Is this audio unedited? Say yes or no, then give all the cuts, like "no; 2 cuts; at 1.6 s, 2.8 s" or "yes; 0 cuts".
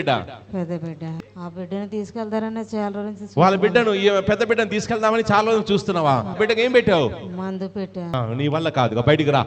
no; 3 cuts; at 1.0 s, 6.3 s, 8.0 s